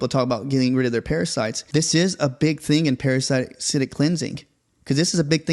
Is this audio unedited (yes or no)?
no